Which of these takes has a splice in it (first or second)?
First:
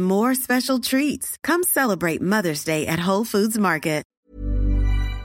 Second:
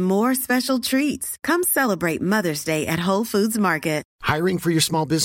first